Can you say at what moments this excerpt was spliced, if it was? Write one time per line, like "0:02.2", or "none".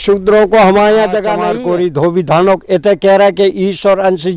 0:01.4

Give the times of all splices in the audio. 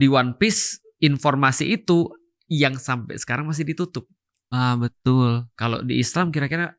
none

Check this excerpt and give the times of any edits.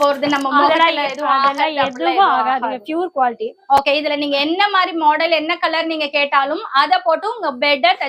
none

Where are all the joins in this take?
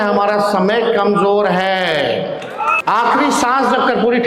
0:02.8

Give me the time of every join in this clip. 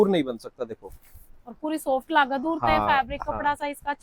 none

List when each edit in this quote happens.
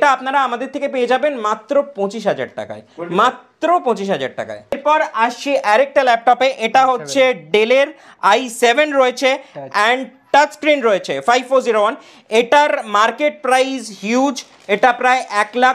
none

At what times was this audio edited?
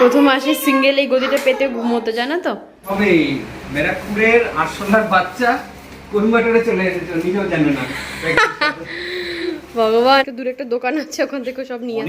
0:02.9
0:10.2

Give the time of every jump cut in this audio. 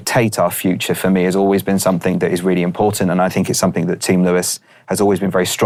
none

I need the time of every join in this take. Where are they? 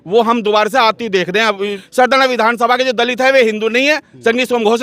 0:01.8

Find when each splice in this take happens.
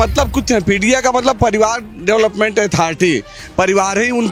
none

